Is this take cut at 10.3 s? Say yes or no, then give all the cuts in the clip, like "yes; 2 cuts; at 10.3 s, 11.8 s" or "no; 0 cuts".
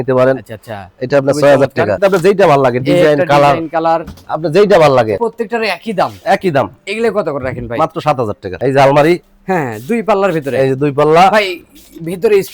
no; 3 cuts; at 2.0 s, 5.2 s, 8.6 s